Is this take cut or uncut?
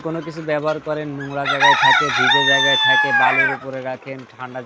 uncut